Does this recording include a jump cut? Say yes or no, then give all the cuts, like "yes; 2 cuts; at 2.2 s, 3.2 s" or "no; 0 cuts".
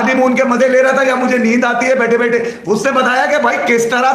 no; 0 cuts